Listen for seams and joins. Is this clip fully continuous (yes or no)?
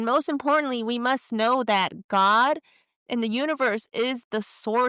yes